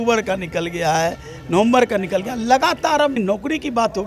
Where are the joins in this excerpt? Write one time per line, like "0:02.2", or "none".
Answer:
0:03.2